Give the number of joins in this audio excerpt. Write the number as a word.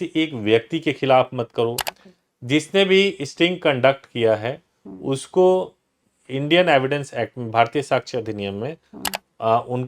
one